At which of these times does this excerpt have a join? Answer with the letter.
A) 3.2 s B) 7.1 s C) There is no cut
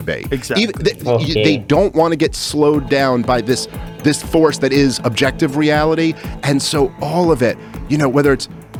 C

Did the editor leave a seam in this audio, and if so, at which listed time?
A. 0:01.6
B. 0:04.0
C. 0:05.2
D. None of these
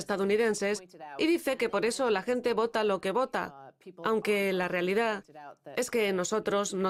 D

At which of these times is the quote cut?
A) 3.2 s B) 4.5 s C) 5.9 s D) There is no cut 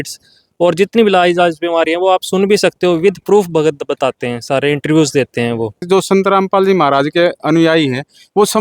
C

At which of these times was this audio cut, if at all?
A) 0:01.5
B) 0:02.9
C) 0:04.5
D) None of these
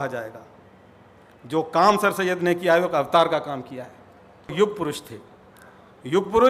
C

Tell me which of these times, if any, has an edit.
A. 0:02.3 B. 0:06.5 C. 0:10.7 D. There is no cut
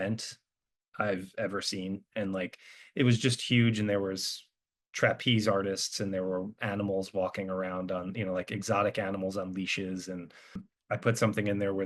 C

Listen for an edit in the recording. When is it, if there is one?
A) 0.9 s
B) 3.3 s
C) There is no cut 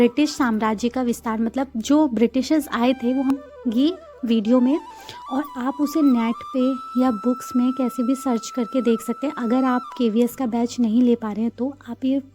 B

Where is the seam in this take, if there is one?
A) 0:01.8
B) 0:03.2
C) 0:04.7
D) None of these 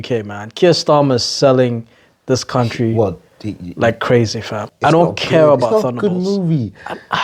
C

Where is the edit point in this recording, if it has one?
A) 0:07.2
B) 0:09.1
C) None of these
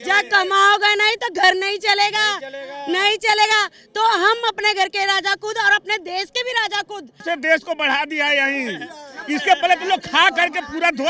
A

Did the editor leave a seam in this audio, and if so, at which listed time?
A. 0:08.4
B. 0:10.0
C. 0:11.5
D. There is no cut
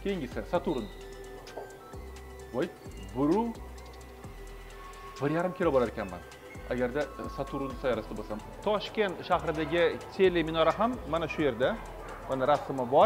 A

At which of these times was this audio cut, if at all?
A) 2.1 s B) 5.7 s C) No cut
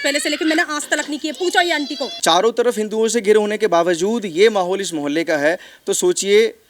A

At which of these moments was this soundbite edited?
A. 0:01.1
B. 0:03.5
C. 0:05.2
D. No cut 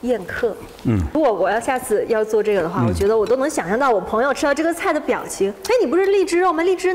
A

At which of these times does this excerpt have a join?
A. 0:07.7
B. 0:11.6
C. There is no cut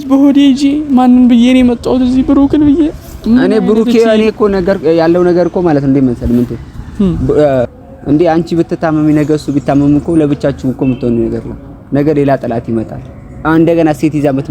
A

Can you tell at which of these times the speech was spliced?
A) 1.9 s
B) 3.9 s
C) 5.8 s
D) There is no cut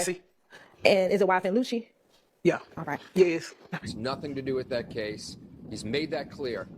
B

